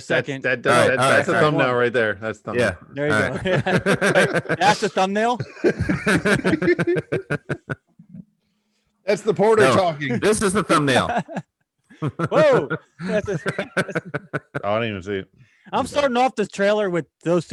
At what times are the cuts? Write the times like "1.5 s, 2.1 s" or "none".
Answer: none